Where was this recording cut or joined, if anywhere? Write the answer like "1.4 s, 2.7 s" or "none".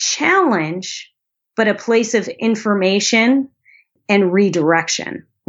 3.9 s